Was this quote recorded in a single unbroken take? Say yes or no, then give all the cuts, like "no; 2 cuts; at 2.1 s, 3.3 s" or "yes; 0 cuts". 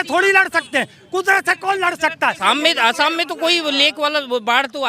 no; 1 cut; at 2.4 s